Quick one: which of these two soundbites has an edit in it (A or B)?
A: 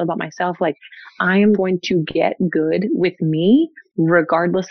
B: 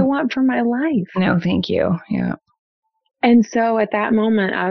A